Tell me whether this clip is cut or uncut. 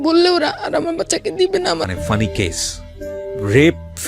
cut